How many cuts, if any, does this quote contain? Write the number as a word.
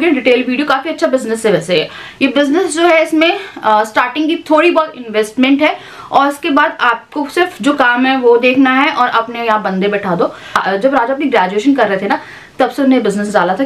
zero